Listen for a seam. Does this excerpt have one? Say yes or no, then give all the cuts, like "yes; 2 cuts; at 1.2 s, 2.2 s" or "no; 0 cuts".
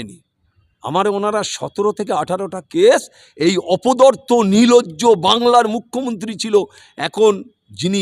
no; 0 cuts